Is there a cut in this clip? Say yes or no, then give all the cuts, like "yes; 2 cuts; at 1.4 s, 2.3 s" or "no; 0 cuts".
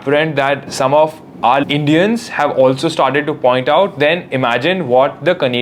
no; 0 cuts